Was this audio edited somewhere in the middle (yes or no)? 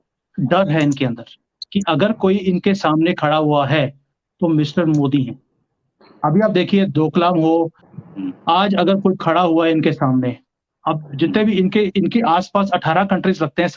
yes